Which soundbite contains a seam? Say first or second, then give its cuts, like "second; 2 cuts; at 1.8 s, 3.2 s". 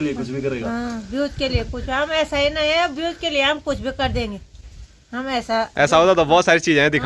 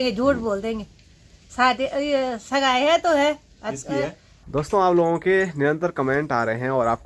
second; 1 cut; at 4.3 s